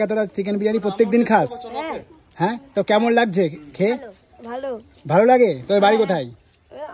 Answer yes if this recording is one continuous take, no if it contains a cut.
yes